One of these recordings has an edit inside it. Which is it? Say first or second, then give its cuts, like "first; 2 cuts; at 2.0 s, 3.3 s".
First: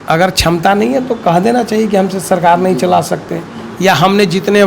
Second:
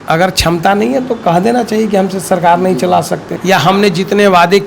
second; 1 cut; at 3.3 s